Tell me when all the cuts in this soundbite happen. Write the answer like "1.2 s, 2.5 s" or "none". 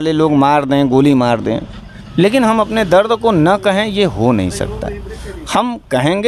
none